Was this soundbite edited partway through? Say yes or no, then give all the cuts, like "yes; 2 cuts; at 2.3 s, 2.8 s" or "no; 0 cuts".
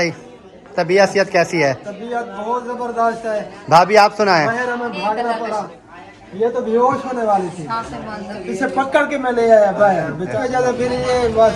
yes; 2 cuts; at 5.8 s, 10.4 s